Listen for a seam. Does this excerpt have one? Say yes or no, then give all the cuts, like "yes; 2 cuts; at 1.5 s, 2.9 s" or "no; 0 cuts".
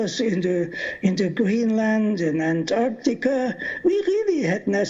yes; 1 cut; at 1.6 s